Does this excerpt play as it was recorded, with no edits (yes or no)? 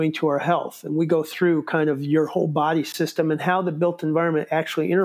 no